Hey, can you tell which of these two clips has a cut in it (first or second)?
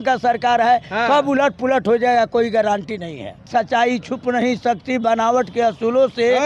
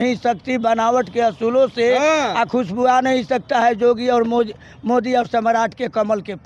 first